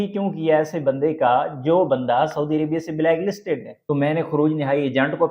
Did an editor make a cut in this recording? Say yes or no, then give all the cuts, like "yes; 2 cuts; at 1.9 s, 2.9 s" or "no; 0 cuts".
yes; 1 cut; at 3.7 s